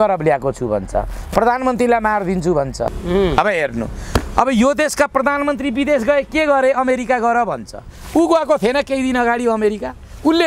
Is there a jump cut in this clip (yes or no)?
yes